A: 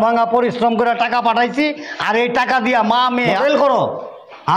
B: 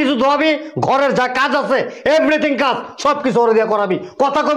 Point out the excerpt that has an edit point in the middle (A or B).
A